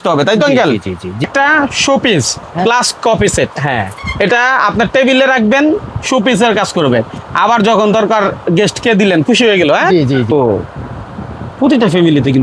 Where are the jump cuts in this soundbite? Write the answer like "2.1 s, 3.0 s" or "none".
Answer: 1.2 s, 10.3 s